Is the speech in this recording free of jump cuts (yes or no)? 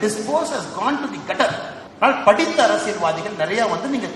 no